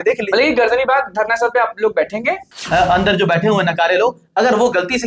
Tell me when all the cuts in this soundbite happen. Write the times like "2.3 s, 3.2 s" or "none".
2.5 s